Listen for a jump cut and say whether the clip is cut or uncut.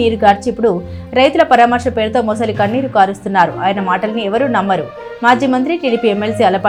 uncut